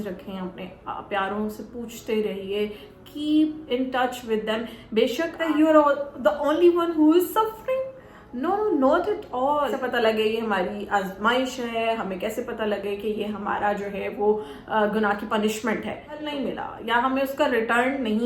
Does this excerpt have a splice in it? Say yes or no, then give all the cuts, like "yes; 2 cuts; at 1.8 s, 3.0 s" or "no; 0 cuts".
yes; 3 cuts; at 5.4 s, 9.8 s, 16.3 s